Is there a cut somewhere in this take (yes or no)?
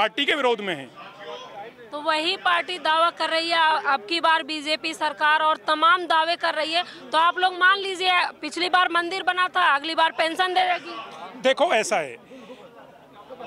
no